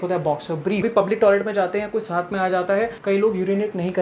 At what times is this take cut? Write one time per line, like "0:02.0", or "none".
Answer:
0:00.9
0:03.0